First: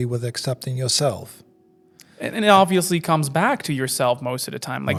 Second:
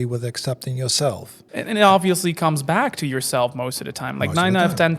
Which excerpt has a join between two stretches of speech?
second; 1 cut; at 1.3 s

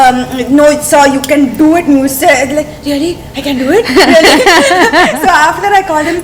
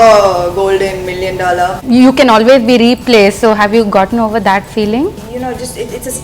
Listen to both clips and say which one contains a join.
second; 2 cuts; at 1.8 s, 5.2 s

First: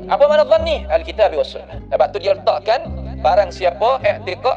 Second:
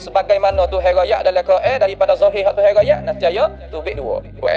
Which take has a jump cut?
first; 1 cut; at 1.8 s

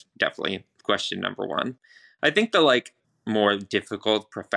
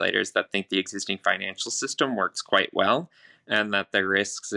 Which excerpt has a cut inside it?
first; 1 cut; at 3.0 s

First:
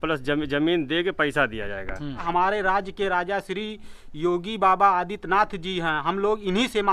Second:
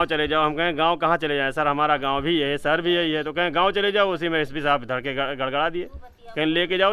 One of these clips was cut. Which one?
first; 1 cut; at 2.2 s

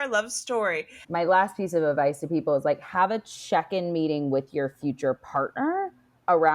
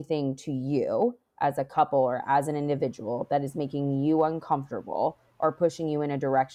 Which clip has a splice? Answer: first; 1 cut; at 1.0 s

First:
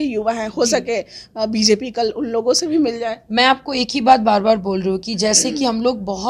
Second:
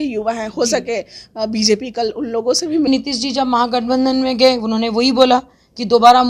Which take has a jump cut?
second; 1 cut; at 2.9 s

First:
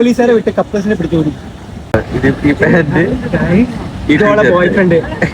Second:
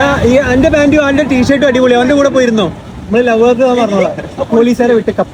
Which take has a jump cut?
first; 1 cut; at 1.9 s

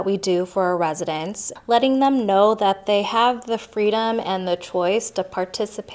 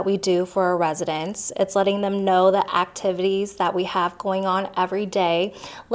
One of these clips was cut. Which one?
first; 1 cut; at 1.4 s

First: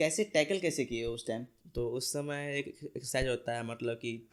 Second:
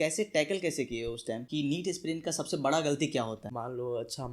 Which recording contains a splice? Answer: second; 2 cuts; at 1.5 s, 3.5 s

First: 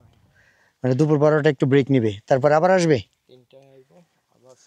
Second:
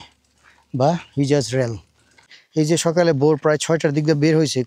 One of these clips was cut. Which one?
second; 1 cut; at 2.4 s

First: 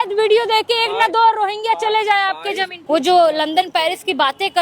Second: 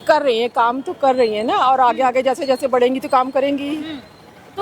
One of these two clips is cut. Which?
first; 1 cut; at 2.7 s

